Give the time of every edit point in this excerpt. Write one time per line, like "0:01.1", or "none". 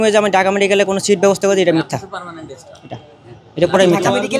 none